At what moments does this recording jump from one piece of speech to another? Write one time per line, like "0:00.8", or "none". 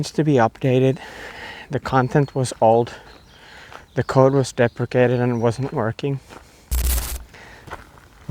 none